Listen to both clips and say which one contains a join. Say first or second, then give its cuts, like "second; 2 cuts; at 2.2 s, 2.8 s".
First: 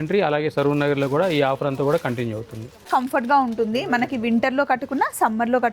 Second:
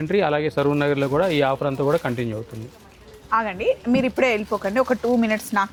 first; 1 cut; at 2.9 s